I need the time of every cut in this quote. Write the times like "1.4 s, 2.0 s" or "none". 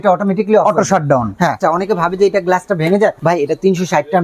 1.6 s, 3.2 s